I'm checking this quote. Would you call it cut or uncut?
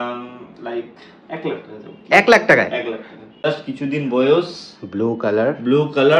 cut